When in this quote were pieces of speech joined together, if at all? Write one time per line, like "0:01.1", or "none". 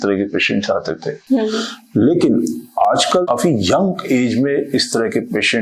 0:03.2